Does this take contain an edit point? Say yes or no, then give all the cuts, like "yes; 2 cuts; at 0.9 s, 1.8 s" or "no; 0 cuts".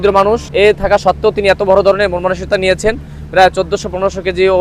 no; 0 cuts